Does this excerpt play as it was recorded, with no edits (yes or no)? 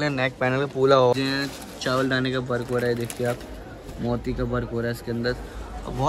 no